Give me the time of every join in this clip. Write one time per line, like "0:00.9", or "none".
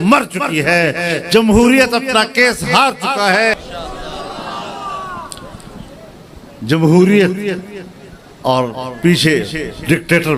0:03.5